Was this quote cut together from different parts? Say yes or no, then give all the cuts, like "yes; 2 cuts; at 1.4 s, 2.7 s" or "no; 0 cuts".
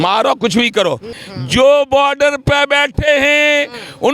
yes; 1 cut; at 1.2 s